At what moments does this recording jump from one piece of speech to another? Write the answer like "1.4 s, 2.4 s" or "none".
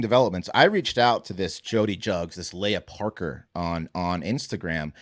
none